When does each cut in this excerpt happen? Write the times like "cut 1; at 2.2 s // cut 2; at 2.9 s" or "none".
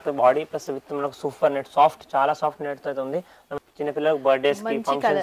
cut 1; at 3.6 s